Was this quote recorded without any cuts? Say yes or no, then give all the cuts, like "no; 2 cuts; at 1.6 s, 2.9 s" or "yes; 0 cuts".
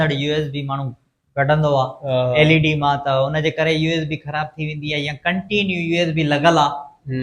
yes; 0 cuts